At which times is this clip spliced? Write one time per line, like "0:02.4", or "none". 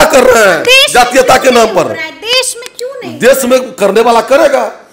none